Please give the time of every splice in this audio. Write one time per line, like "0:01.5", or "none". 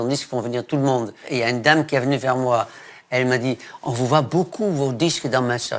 0:01.3
0:02.9